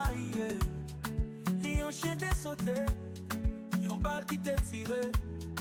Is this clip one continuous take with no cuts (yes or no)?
yes